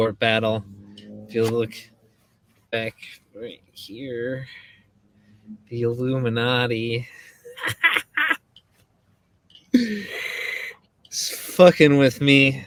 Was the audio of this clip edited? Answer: no; 0 cuts

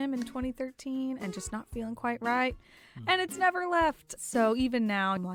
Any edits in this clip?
no; 0 cuts

